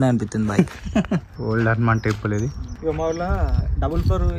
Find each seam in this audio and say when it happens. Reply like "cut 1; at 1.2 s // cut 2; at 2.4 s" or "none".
cut 1; at 1.3 s // cut 2; at 2.7 s